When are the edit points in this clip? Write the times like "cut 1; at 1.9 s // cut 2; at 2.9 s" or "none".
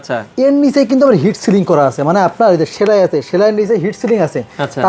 cut 1; at 2.7 s